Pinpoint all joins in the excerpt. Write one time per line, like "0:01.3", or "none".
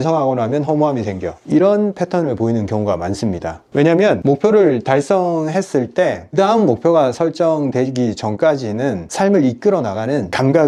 none